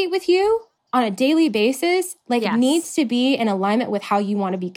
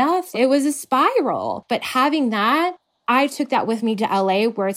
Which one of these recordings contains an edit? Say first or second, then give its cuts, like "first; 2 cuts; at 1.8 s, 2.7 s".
second; 2 cuts; at 1.6 s, 2.9 s